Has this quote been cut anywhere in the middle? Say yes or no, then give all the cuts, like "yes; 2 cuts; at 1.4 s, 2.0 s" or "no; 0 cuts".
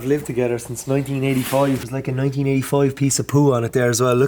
yes; 1 cut; at 1.9 s